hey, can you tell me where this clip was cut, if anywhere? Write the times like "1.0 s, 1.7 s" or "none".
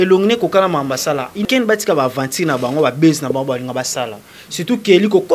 1.5 s

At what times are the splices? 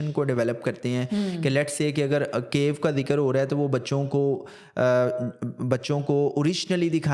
none

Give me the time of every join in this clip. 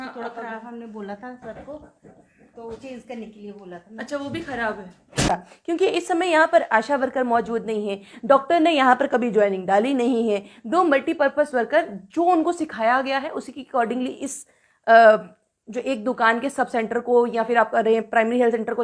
5.3 s

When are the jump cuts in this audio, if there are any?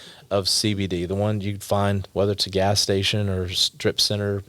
2.0 s

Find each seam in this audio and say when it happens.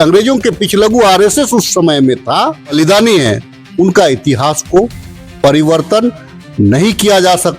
2.7 s

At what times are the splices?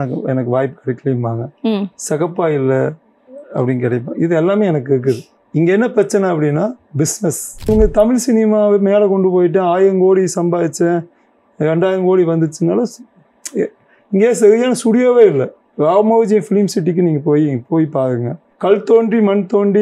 7.7 s

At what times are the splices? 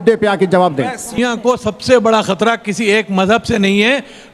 1.2 s

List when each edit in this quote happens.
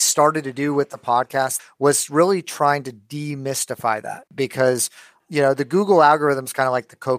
1.6 s, 4.3 s

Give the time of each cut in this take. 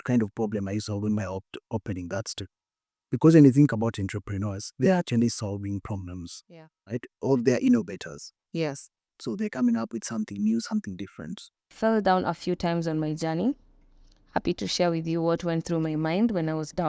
11.7 s

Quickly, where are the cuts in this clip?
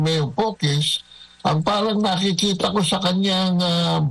none

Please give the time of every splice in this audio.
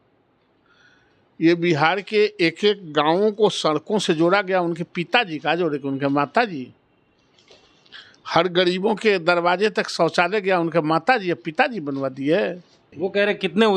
12.8 s

